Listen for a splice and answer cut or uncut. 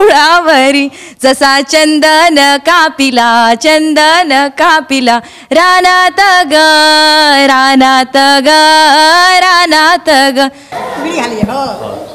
cut